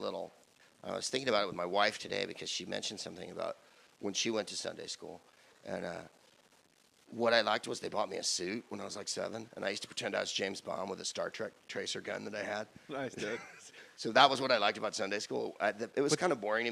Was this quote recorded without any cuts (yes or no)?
yes